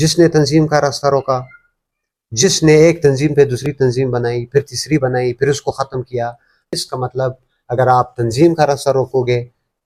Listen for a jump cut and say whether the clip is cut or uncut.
uncut